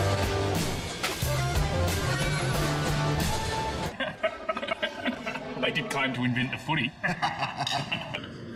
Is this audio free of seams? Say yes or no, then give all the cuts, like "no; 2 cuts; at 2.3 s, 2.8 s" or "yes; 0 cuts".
yes; 0 cuts